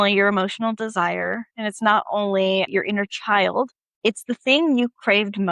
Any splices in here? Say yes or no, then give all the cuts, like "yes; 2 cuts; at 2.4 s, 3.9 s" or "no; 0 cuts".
yes; 2 cuts; at 2.7 s, 3.8 s